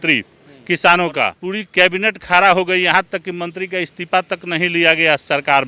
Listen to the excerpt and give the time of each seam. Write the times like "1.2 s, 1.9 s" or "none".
1.4 s